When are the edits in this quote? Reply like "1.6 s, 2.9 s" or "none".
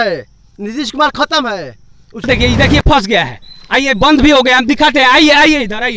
2.3 s